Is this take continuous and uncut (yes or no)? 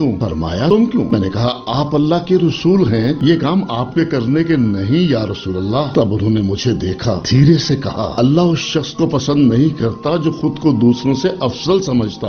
yes